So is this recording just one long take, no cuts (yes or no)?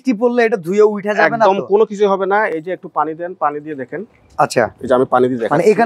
yes